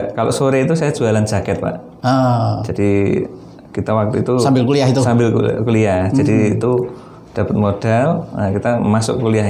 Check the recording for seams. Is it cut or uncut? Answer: uncut